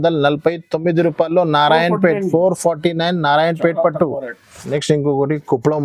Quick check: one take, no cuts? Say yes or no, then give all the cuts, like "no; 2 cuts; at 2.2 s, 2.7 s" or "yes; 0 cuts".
yes; 0 cuts